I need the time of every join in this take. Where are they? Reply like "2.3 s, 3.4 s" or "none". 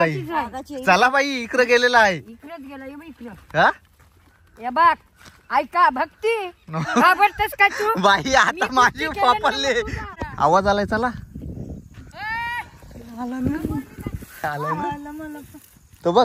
10.0 s